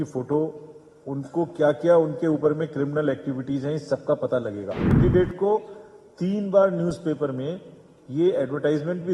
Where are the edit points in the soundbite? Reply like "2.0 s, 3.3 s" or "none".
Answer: 4.9 s